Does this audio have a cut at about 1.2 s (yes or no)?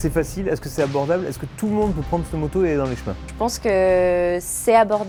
no